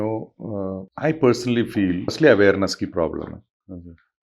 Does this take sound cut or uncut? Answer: cut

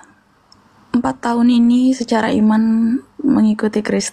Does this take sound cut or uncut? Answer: uncut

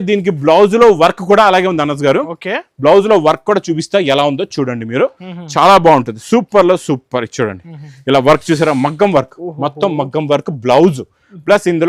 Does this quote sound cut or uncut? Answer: uncut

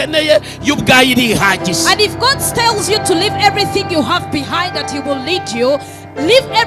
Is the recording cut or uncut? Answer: uncut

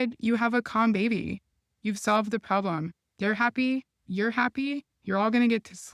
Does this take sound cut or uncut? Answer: uncut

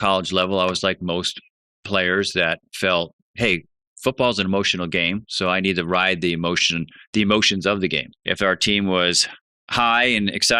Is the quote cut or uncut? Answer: cut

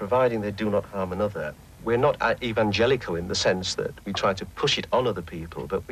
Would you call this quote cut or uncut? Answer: uncut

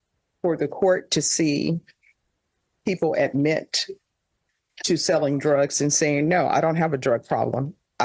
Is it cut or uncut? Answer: uncut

